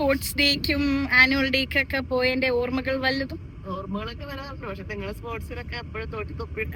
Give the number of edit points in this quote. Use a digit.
0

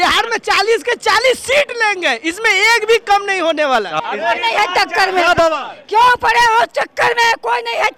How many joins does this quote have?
1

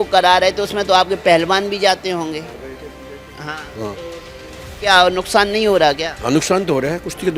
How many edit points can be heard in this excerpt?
0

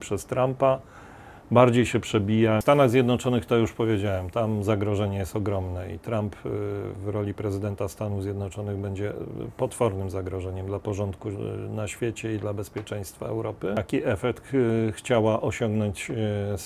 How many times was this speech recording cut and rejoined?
2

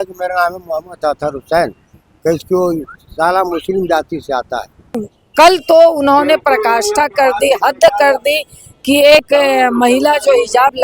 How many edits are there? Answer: 1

